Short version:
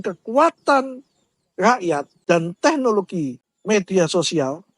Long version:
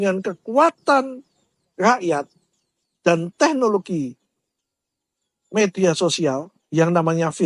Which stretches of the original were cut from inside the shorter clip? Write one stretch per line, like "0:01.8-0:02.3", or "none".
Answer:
0:02.3-0:02.9
0:04.2-0:05.3